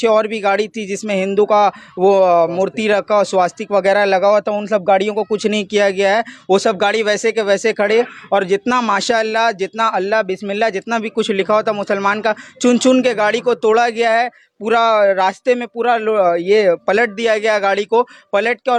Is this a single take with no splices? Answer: yes; 0 cuts

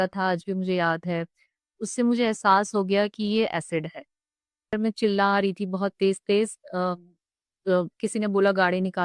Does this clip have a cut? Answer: yes; 1 cut; at 4.7 s

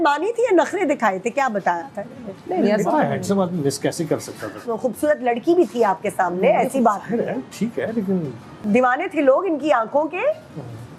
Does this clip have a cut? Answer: yes; 2 cuts; at 4.6 s, 8.6 s

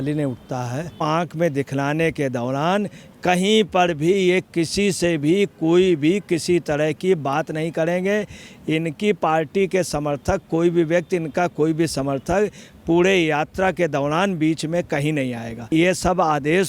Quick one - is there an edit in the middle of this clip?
yes; 2 cuts; at 1.0 s, 15.6 s

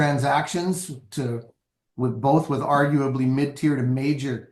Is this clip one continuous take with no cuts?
yes; 0 cuts

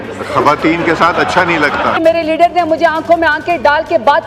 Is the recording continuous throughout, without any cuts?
no; 1 cut; at 1.9 s

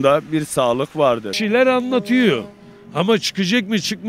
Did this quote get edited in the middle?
yes; 1 cut; at 1.3 s

